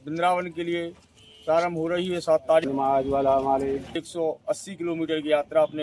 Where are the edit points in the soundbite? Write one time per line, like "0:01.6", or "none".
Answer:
0:02.6
0:04.0